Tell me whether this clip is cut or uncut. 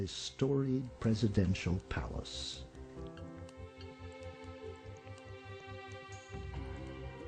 uncut